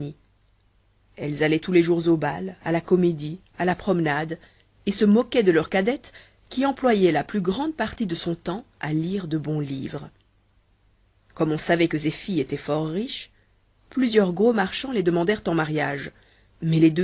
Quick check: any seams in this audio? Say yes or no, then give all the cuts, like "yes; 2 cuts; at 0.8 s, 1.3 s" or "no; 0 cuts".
yes; 1 cut; at 7.6 s